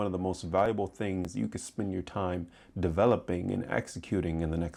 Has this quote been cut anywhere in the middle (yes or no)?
no